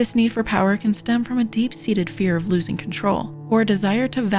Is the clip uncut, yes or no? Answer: no